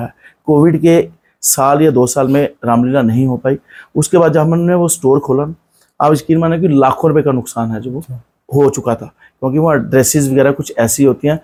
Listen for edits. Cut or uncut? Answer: uncut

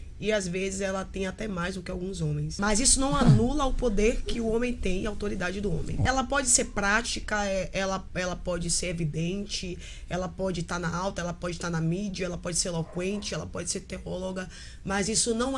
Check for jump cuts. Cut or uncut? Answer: cut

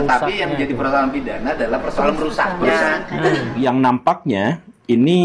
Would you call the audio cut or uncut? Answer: cut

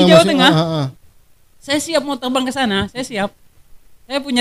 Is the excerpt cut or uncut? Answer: uncut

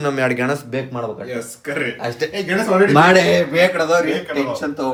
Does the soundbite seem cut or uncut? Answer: uncut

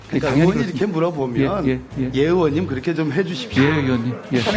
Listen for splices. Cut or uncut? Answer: uncut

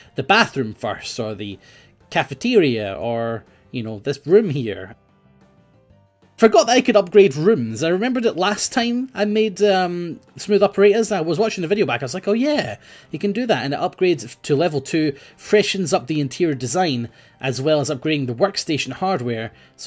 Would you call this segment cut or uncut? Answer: uncut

